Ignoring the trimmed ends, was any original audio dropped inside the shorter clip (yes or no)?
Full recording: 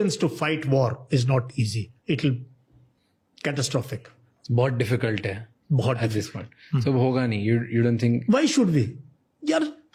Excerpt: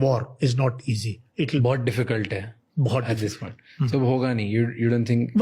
yes